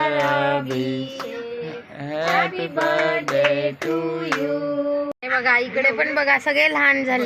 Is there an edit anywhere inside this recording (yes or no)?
yes